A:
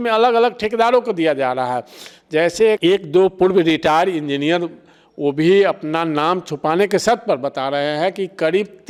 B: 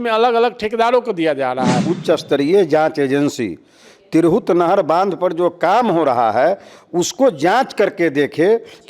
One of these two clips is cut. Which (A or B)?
B